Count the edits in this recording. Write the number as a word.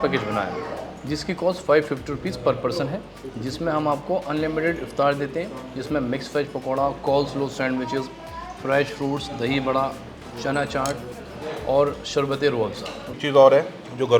one